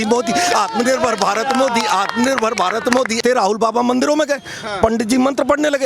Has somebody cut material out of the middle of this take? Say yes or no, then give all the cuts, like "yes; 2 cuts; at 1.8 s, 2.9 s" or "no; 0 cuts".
yes; 1 cut; at 3.2 s